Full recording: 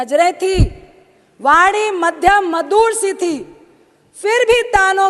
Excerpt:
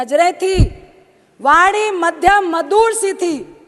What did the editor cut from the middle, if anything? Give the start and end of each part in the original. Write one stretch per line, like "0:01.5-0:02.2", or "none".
none

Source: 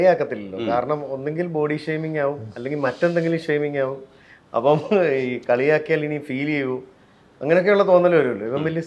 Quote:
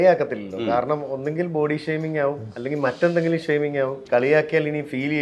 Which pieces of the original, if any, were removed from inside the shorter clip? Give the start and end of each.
0:04.0-0:05.4

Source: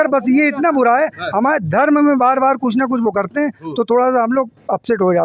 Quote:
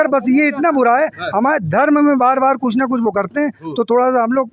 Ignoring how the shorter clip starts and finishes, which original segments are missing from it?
none

